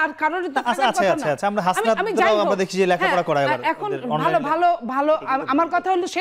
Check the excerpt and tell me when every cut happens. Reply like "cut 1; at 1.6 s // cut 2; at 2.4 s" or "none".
none